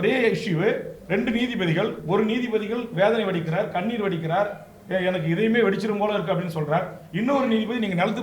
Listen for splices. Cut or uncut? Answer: uncut